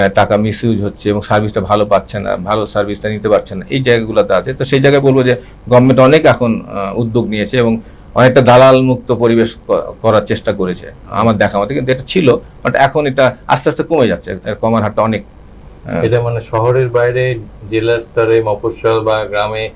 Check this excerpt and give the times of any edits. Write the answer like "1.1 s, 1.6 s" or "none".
none